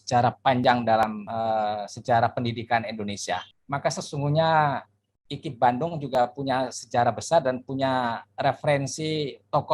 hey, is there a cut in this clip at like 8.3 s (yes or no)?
no